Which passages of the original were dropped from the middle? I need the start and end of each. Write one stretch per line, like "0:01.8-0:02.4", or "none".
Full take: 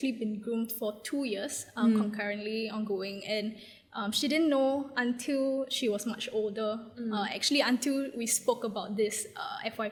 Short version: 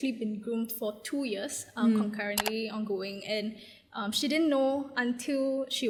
none